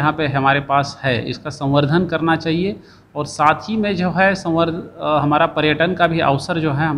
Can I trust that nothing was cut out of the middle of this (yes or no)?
yes